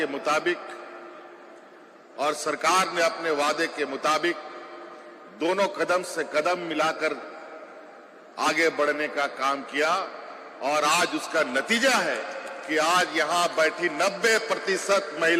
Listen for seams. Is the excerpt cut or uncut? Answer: uncut